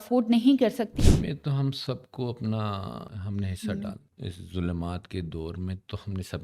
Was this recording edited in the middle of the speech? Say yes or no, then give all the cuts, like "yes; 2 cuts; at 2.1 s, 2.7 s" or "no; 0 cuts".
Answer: yes; 3 cuts; at 0.9 s, 3.1 s, 4.1 s